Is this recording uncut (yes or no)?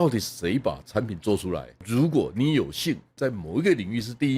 no